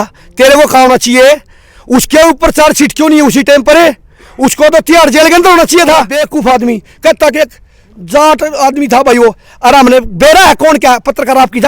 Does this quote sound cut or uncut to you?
cut